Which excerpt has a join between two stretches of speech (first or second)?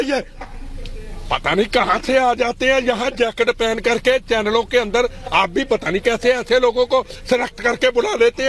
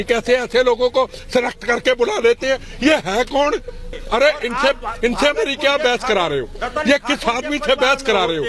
second